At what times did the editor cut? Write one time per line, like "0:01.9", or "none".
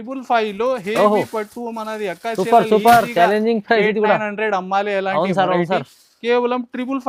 none